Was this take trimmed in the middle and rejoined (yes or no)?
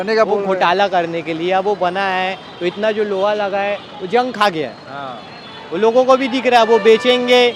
no